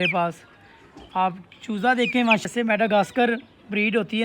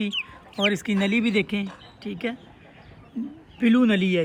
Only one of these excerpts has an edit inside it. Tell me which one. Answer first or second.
first